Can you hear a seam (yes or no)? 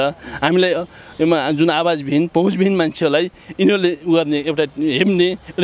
no